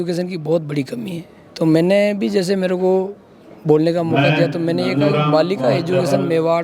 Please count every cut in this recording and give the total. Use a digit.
0